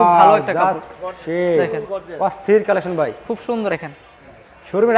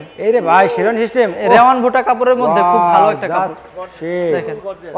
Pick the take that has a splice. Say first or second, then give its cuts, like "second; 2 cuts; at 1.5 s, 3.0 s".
first; 1 cut; at 3.7 s